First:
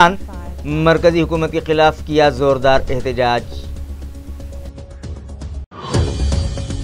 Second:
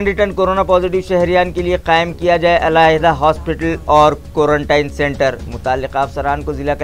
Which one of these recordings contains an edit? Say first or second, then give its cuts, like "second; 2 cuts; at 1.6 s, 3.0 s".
first; 2 cuts; at 3.6 s, 5.6 s